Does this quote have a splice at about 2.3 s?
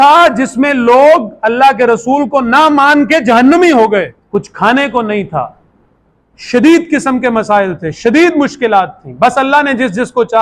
no; 1 cut; at 4.2 s

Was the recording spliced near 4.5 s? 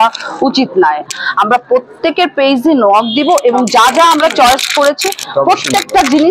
no; 1 cut; at 1.2 s

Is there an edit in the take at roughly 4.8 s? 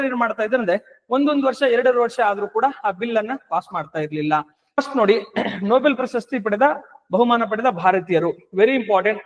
yes; 1 cut; at 4.8 s

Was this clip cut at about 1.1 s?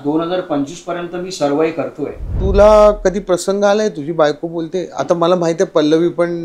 no; 1 cut; at 2.3 s

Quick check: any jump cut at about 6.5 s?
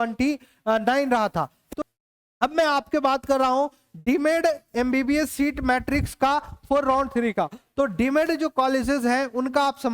no; 1 cut; at 1.7 s

